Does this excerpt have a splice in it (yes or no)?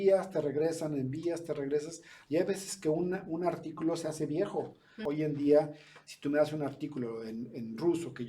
yes